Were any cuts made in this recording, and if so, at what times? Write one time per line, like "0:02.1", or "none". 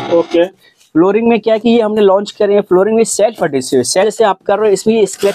0:04.0